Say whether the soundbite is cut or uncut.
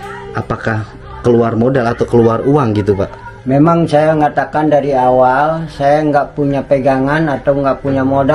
uncut